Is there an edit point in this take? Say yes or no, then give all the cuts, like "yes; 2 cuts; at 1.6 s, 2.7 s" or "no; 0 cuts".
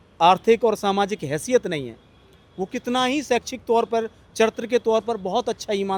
no; 0 cuts